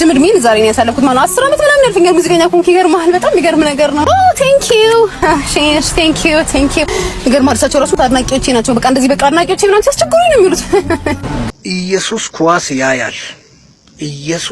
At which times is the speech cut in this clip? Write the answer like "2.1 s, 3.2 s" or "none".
11.4 s